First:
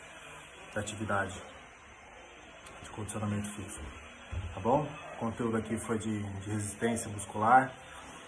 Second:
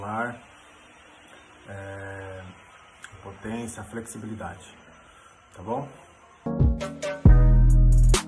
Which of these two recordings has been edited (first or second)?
second